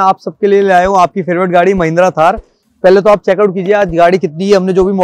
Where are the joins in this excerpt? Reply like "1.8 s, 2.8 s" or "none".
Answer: none